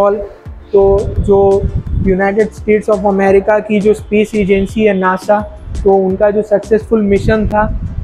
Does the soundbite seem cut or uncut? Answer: uncut